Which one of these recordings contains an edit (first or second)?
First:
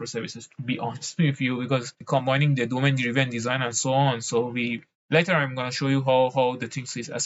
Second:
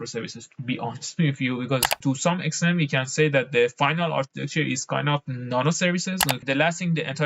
second